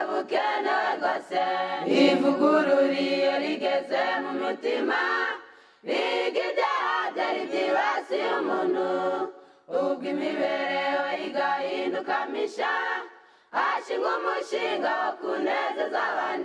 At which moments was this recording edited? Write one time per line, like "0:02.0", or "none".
none